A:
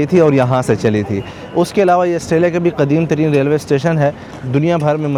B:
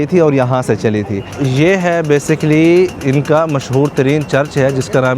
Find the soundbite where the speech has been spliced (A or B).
B